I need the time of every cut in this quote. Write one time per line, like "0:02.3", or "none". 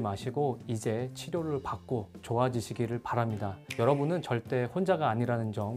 none